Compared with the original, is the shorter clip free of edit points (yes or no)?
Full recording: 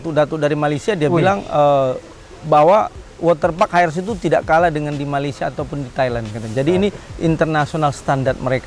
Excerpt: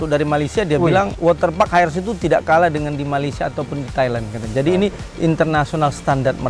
no